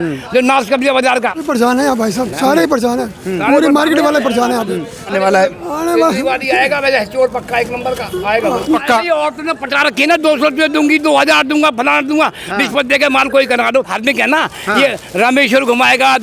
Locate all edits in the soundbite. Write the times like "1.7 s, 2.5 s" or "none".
1.4 s, 5.1 s, 8.8 s, 13.9 s